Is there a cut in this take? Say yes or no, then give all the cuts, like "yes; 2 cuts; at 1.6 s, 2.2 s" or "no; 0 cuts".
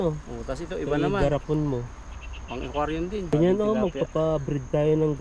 yes; 1 cut; at 3.3 s